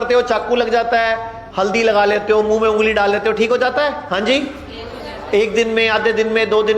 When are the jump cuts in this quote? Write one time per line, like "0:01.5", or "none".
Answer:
0:01.3
0:04.0